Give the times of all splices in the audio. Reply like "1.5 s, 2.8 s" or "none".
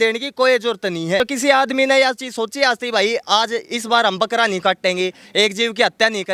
1.2 s